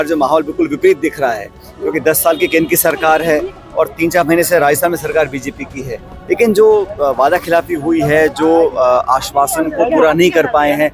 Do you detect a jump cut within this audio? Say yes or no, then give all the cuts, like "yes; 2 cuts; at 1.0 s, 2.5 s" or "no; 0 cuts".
no; 0 cuts